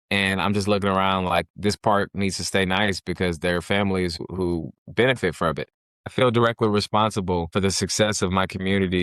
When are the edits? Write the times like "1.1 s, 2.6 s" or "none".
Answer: 4.2 s, 6.1 s, 7.5 s